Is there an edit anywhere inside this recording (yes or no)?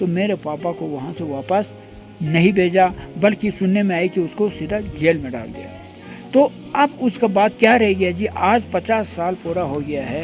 no